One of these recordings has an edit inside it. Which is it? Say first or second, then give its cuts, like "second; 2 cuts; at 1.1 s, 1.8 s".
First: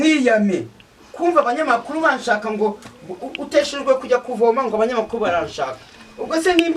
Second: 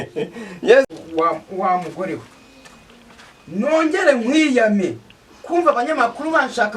second; 1 cut; at 1.0 s